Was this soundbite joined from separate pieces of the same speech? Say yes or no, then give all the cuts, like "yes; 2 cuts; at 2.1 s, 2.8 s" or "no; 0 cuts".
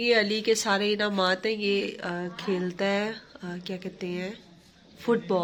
no; 0 cuts